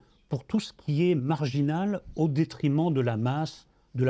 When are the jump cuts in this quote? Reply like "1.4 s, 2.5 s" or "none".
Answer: 2.0 s